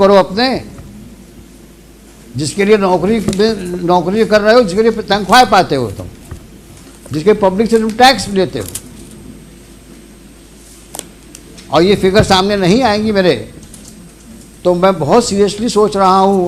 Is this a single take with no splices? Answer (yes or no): yes